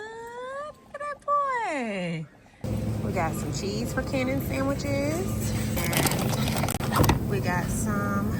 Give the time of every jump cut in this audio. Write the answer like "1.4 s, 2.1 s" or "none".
none